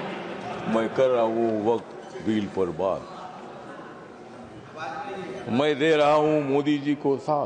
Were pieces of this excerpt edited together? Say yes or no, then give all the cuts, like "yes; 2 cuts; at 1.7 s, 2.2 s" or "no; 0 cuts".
no; 0 cuts